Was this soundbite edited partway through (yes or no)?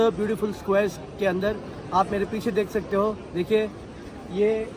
no